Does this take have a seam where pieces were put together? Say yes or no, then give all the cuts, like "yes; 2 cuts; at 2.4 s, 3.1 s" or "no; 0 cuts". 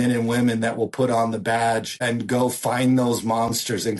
yes; 1 cut; at 2.0 s